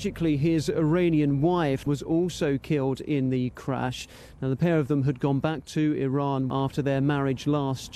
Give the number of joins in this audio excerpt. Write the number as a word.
two